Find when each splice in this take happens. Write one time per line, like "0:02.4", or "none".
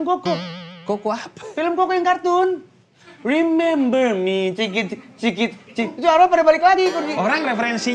none